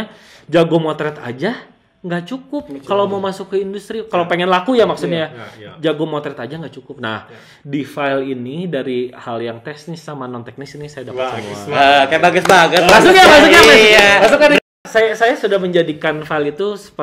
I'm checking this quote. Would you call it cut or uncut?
cut